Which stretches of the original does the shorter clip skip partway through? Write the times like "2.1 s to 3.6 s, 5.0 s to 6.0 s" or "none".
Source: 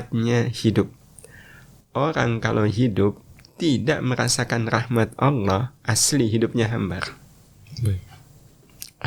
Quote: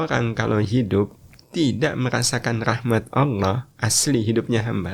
none

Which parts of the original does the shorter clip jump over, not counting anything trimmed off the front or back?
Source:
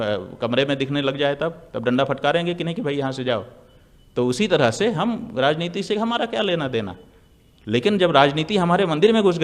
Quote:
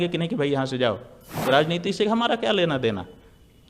3.8 s to 5.3 s

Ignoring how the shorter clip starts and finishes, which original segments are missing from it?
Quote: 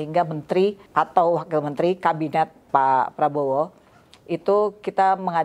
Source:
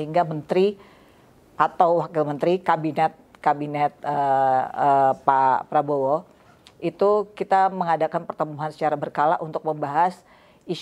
0.8 s to 1.5 s, 3.3 s to 5.2 s

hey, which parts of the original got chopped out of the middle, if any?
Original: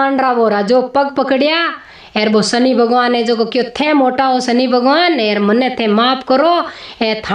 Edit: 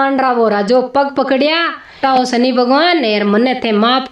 2.0 s to 4.1 s

